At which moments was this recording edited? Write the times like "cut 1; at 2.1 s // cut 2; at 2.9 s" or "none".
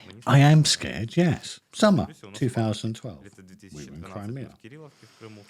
cut 1; at 1.5 s